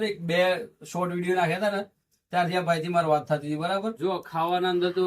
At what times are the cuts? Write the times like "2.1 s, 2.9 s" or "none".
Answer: 3.9 s